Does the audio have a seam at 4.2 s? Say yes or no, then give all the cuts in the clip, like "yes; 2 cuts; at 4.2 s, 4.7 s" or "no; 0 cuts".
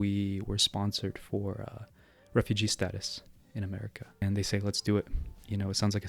yes; 1 cut; at 4.2 s